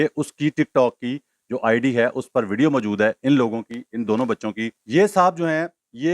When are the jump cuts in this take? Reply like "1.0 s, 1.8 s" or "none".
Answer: 4.8 s